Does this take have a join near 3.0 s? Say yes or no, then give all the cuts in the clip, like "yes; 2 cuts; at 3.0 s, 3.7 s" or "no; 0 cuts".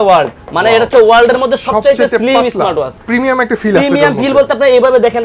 yes; 1 cut; at 3.0 s